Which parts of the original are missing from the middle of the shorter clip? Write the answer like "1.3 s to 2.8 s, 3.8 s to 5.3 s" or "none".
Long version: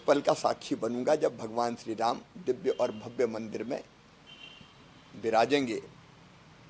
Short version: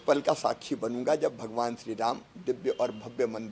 none